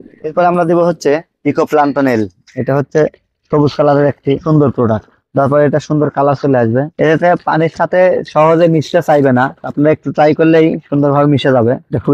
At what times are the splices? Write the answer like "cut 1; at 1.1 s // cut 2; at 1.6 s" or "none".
cut 1; at 6.9 s